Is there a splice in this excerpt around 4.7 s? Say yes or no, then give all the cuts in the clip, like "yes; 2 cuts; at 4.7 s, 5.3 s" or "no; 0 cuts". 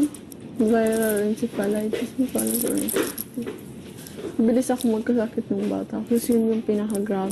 yes; 1 cut; at 4.7 s